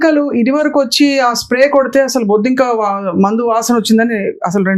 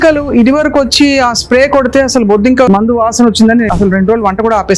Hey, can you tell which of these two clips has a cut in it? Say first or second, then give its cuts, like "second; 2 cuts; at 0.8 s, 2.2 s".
second; 2 cuts; at 2.7 s, 3.7 s